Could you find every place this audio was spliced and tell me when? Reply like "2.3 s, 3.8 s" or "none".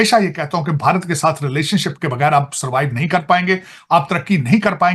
3.7 s